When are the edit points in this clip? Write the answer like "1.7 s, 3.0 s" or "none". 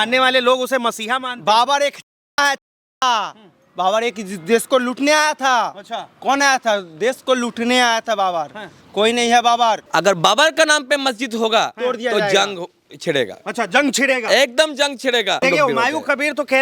9.8 s, 15.4 s